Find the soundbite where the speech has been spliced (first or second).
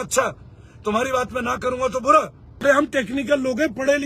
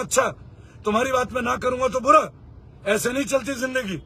first